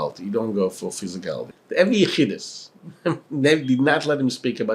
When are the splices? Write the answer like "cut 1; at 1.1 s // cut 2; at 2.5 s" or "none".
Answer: cut 1; at 1.5 s

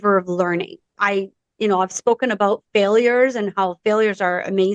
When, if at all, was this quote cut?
cut 1; at 0.9 s

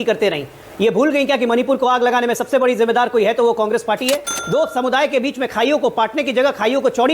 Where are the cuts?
cut 1; at 4.3 s

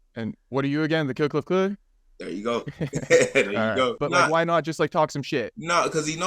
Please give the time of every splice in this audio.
cut 1; at 4.0 s

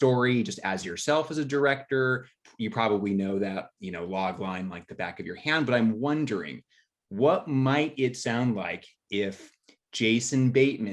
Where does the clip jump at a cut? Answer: none

